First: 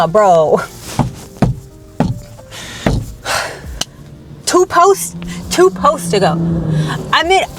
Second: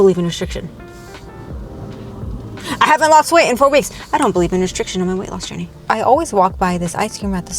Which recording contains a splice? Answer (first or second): second